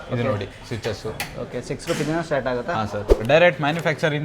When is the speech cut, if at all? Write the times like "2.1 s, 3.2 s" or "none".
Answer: 3.1 s